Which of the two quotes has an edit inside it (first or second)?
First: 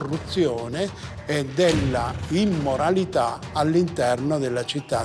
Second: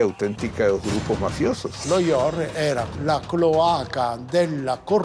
second